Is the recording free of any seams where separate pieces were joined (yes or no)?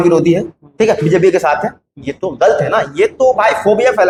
yes